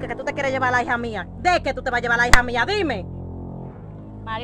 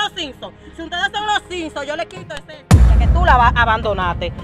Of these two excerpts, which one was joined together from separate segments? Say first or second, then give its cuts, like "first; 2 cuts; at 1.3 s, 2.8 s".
second; 1 cut; at 2.7 s